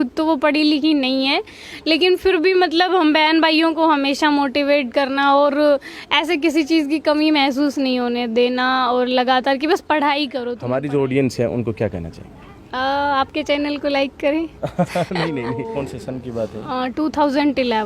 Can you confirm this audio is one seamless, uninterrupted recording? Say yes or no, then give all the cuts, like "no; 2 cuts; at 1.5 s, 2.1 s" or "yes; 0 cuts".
no; 2 cuts; at 10.5 s, 15.6 s